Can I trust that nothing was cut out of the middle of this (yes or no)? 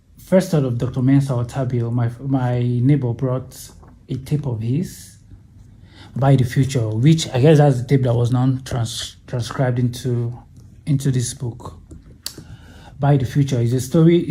yes